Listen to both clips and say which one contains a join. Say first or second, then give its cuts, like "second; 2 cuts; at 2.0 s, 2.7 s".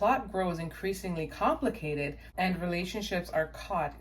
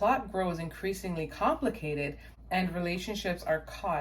first; 1 cut; at 2.2 s